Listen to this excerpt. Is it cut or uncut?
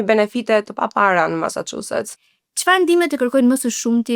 cut